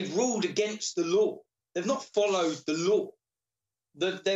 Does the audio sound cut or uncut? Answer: uncut